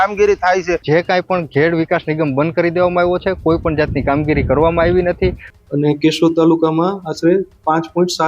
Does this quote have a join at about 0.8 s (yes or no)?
yes